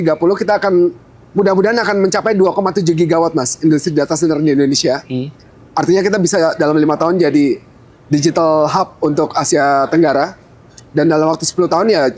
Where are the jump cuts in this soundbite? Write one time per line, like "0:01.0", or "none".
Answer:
none